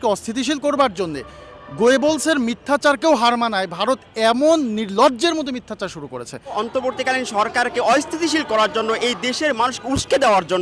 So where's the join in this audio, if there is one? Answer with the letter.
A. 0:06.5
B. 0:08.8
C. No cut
A